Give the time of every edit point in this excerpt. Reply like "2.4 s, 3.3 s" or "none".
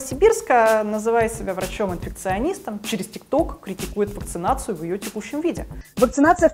none